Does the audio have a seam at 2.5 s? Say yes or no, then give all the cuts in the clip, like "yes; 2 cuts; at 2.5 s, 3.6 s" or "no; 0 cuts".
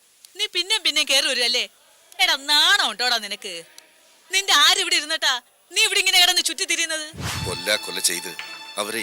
no; 1 cut; at 7.2 s